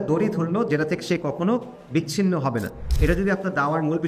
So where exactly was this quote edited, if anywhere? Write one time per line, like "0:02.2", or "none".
0:02.8